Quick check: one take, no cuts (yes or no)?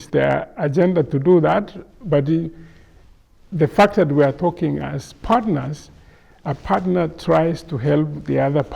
yes